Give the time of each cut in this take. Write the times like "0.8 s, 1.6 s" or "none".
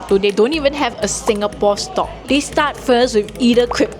2.2 s